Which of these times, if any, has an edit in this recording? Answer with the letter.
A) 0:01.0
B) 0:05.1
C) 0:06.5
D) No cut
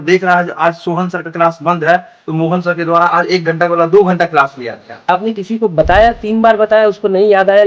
B